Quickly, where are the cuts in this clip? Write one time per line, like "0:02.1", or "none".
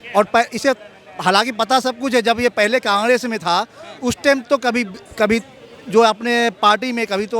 none